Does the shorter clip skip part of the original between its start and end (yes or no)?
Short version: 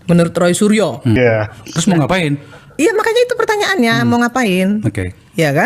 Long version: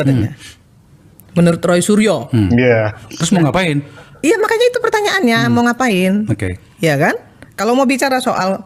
yes